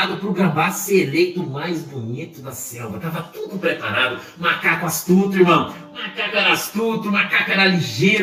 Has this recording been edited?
no; 0 cuts

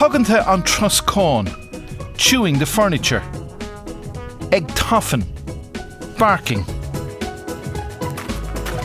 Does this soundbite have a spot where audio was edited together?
yes; 1 cut; at 6.7 s

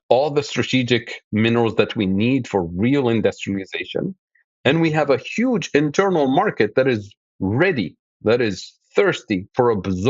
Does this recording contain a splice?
no; 0 cuts

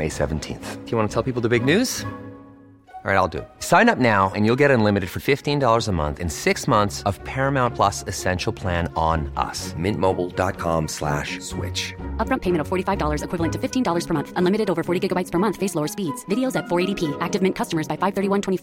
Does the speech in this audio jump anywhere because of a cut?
no; 0 cuts

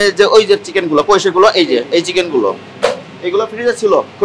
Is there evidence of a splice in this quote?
no; 0 cuts

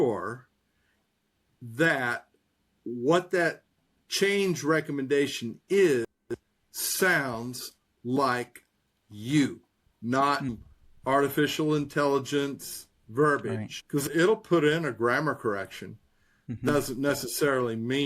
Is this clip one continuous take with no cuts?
no; 3 cuts; at 10.5 s, 13.7 s, 16.5 s

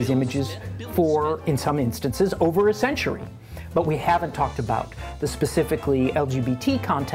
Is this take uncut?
yes; 0 cuts

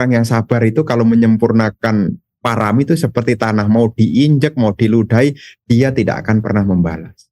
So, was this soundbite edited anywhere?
no; 0 cuts

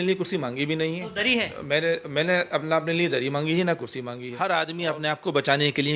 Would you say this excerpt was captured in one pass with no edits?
no; 1 cut; at 4.2 s

